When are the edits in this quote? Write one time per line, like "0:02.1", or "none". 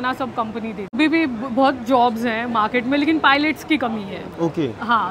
0:00.9